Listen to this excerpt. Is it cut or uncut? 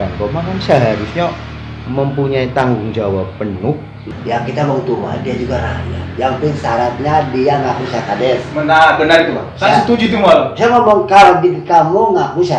cut